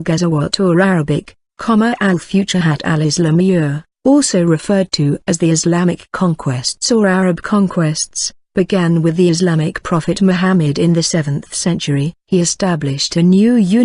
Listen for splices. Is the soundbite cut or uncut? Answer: uncut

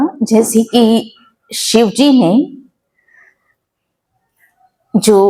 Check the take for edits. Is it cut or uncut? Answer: uncut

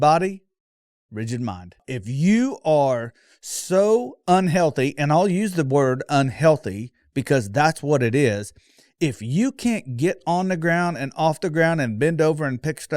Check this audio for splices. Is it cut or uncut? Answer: cut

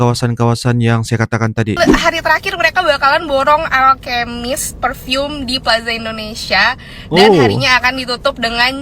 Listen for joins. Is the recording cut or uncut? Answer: cut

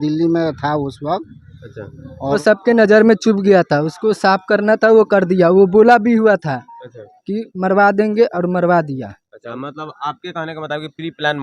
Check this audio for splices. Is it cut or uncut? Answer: cut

